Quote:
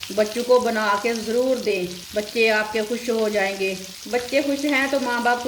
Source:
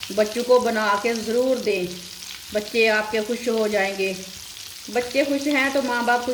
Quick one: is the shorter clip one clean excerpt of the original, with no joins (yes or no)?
no